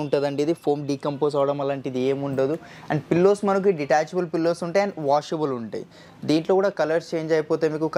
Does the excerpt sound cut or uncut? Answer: uncut